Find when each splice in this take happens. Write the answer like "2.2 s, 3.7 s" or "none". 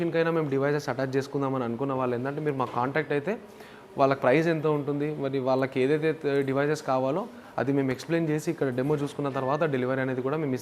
none